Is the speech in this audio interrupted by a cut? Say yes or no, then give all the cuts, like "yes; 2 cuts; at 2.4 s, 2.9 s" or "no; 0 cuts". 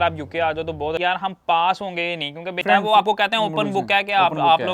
yes; 2 cuts; at 1.0 s, 2.6 s